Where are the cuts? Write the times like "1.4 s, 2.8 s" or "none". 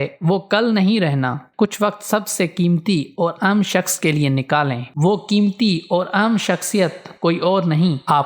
1.5 s, 4.9 s